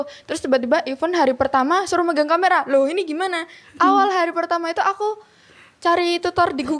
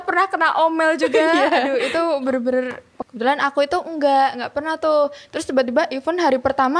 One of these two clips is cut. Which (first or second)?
second